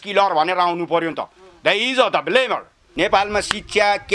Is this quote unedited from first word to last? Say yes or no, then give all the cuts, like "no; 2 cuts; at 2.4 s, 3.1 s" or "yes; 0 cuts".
no; 1 cut; at 2.9 s